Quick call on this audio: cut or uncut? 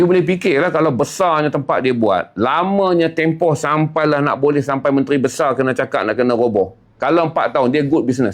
uncut